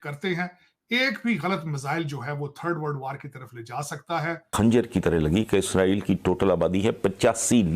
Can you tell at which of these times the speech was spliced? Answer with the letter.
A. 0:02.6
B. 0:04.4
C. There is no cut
B